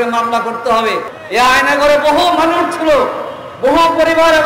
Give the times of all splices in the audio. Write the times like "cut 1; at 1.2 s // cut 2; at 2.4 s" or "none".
cut 1; at 1.1 s